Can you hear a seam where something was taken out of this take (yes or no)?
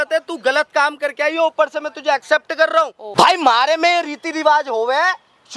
yes